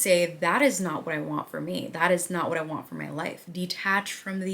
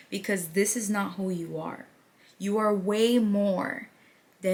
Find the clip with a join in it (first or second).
first